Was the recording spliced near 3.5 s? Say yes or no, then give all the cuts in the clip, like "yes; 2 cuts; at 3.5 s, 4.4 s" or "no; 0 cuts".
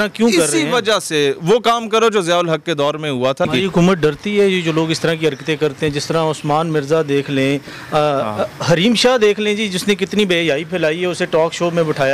yes; 1 cut; at 3.5 s